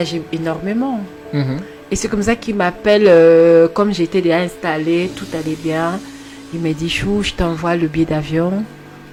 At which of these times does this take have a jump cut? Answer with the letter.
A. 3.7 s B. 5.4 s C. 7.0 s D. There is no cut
D